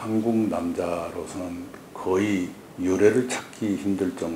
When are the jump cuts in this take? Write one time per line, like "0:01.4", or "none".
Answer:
0:02.6